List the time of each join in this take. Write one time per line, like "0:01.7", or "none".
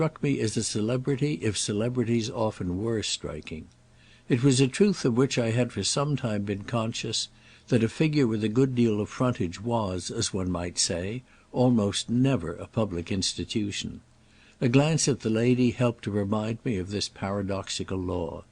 0:15.5